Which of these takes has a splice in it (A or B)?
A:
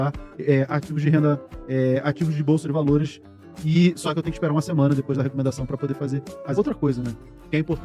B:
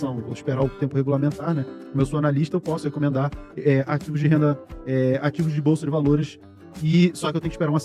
A